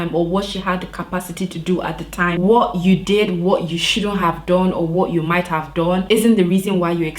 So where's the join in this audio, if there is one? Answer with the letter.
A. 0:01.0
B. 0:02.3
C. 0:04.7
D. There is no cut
B